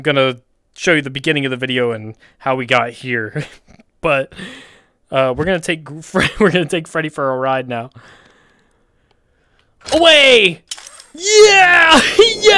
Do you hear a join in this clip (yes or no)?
no